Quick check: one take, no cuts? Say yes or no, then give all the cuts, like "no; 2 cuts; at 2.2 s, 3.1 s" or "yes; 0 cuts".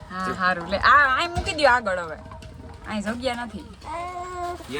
yes; 0 cuts